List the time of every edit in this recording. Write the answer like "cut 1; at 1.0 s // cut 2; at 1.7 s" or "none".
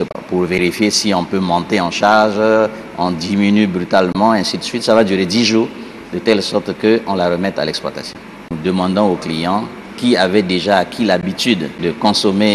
cut 1; at 8.5 s // cut 2; at 11.5 s